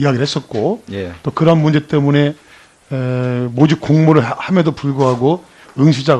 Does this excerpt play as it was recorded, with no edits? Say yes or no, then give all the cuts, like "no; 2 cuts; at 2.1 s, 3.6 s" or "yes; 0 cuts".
no; 1 cut; at 2.0 s